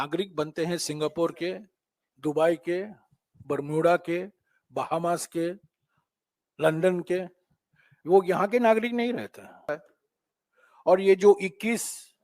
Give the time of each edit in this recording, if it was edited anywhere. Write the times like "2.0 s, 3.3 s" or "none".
9.7 s